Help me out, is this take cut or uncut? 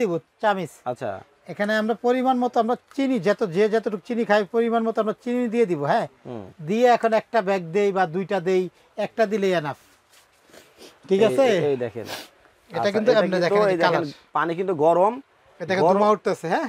uncut